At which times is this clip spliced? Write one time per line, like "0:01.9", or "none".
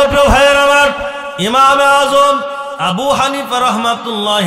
0:01.5
0:02.7